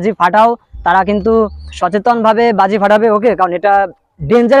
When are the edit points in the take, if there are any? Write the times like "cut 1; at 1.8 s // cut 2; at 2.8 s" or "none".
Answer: cut 1; at 1.7 s